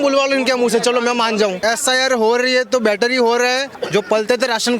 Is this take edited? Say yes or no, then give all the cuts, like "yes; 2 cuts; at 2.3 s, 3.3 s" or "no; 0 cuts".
yes; 2 cuts; at 1.6 s, 3.7 s